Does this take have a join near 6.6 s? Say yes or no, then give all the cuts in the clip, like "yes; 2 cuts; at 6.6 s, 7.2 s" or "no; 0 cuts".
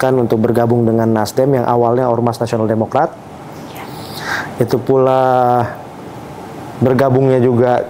no; 0 cuts